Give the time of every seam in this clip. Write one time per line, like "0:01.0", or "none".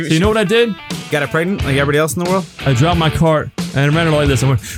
0:00.9
0:02.7
0:03.6